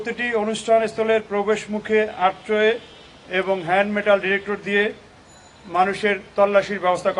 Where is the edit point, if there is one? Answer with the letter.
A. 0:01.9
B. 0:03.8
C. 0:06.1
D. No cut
D